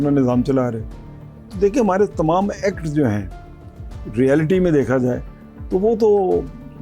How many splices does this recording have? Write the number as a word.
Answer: zero